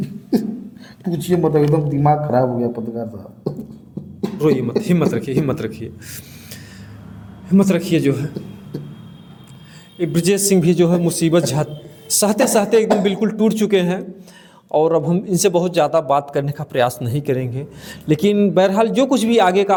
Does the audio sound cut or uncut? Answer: uncut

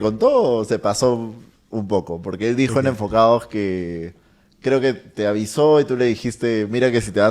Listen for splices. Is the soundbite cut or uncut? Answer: uncut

